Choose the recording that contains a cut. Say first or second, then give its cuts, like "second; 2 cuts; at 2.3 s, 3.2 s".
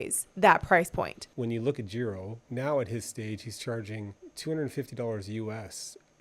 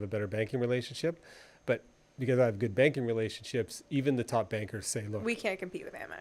first; 3 cuts; at 1.2 s, 2.4 s, 4.2 s